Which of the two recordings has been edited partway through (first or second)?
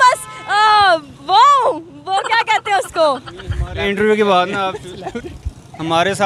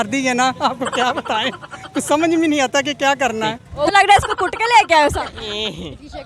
second